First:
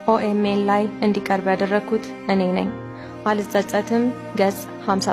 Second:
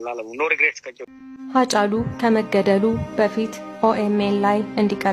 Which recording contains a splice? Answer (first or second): second